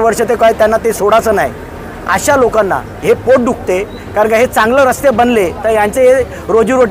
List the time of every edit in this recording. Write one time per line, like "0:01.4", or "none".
none